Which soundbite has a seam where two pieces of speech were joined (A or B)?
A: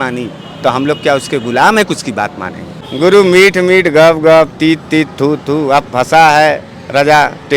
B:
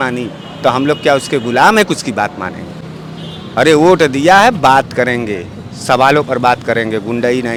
A